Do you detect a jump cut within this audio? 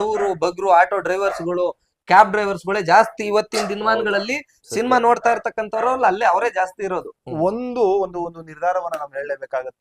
yes; 1 cut; at 7.2 s

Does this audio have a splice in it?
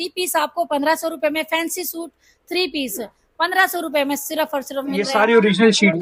yes; 1 cut; at 5.0 s

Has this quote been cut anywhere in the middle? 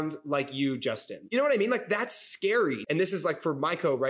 yes; 2 cuts; at 1.1 s, 2.8 s

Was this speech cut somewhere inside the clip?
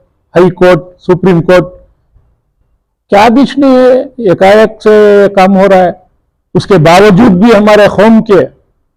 no; 0 cuts

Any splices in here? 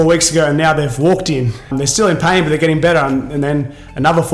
no; 0 cuts

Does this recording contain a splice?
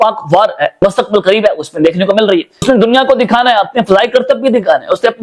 yes; 2 cuts; at 0.8 s, 2.6 s

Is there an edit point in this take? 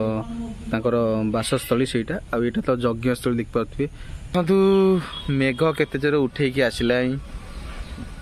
yes; 1 cut; at 4.3 s

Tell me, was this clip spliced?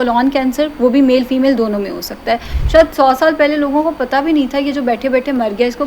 yes; 1 cut; at 2.5 s

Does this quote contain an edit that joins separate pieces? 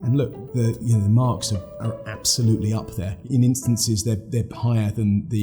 yes; 1 cut; at 3.3 s

